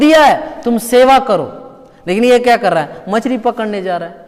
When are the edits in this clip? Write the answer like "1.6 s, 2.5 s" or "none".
none